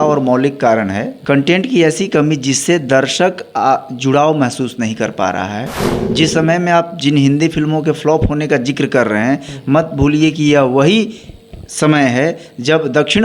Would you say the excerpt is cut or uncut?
cut